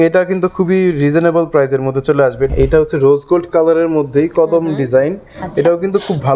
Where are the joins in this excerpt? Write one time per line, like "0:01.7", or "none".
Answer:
0:02.5